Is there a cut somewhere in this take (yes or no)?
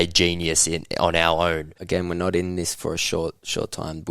yes